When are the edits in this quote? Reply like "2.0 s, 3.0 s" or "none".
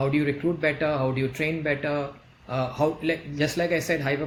none